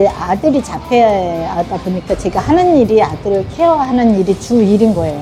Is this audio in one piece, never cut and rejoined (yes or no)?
yes